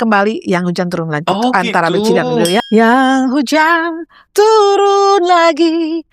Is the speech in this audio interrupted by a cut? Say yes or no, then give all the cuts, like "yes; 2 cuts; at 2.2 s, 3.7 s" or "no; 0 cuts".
yes; 1 cut; at 2.6 s